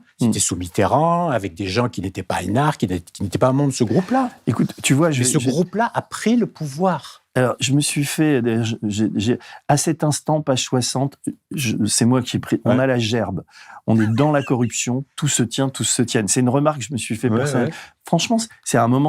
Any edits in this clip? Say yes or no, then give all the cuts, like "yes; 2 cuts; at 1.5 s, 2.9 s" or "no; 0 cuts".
no; 0 cuts